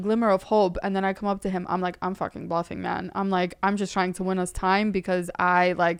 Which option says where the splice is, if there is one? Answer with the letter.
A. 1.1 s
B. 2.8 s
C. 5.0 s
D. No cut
D